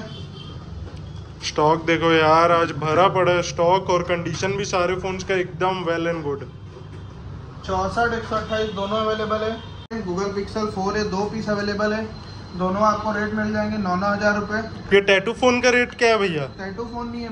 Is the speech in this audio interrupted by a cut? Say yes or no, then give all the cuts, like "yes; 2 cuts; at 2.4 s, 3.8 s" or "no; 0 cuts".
yes; 1 cut; at 9.9 s